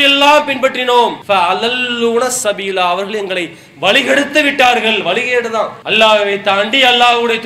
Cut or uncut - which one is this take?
cut